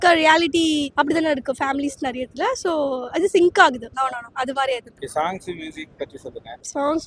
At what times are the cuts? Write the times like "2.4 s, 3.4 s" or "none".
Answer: none